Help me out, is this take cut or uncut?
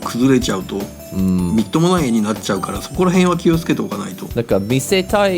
cut